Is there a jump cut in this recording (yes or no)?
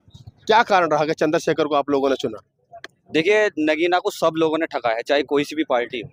no